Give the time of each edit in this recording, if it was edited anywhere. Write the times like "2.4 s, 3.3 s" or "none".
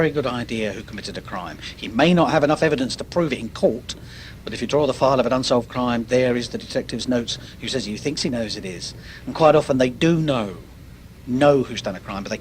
5.4 s

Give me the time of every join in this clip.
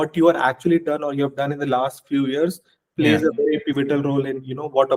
none

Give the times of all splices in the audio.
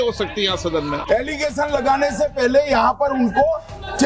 1.0 s

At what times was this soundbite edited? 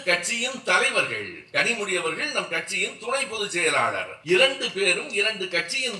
4.1 s

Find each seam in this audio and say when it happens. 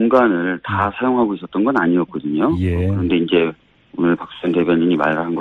none

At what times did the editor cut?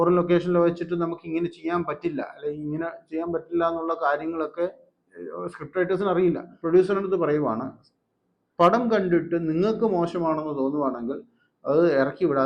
6.5 s

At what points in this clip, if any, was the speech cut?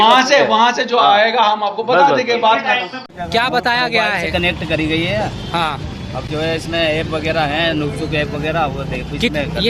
3.0 s

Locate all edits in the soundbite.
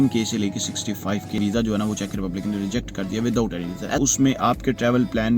1.4 s, 4.0 s

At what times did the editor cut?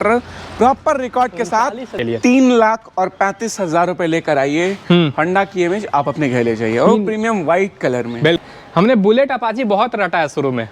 2.0 s, 8.4 s

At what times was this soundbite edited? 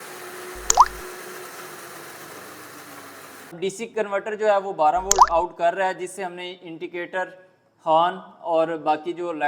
3.6 s

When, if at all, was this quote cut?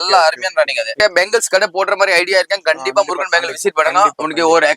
1.0 s

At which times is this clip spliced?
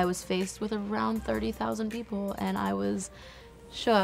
none

